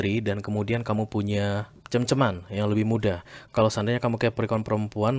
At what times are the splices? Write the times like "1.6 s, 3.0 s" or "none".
1.7 s